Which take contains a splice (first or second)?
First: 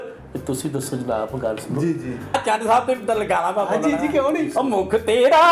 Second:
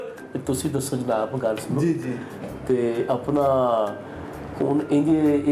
first